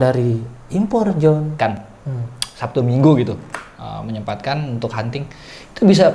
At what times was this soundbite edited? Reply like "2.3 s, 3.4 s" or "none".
1.9 s